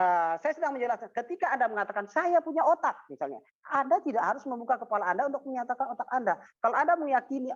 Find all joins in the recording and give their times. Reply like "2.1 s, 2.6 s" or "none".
none